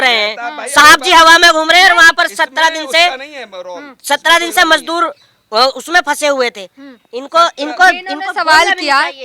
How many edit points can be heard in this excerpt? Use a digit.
0